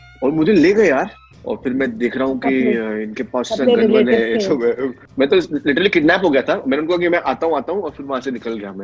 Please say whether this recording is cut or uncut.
cut